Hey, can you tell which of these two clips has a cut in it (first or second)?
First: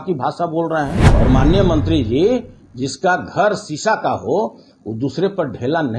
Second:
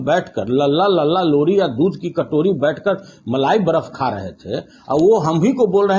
first